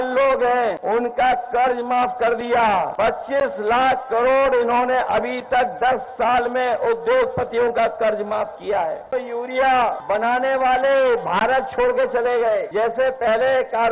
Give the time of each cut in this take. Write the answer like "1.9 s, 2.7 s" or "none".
0.8 s, 2.9 s, 9.1 s, 10.0 s, 12.7 s